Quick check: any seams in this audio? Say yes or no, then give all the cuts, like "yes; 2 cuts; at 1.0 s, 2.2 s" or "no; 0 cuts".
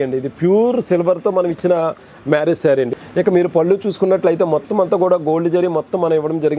yes; 1 cut; at 2.9 s